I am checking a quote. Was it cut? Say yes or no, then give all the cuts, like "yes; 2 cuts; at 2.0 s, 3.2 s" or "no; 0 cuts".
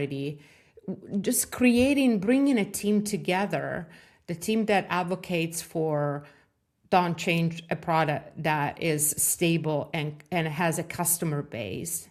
no; 0 cuts